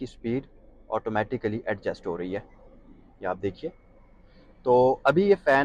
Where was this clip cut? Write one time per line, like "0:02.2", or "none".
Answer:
none